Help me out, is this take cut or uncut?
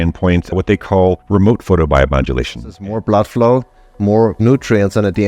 cut